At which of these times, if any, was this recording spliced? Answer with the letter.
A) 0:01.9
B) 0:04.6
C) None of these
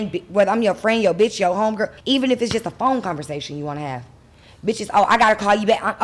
A